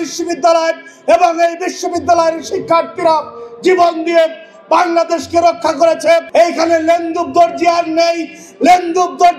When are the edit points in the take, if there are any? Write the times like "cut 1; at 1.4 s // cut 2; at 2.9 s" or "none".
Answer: cut 1; at 6.3 s